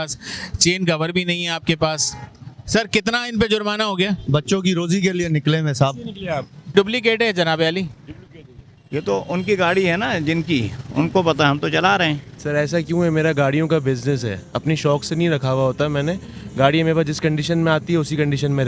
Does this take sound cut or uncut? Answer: cut